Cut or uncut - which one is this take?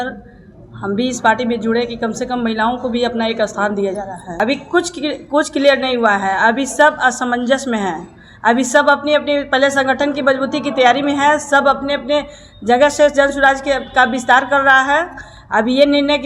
cut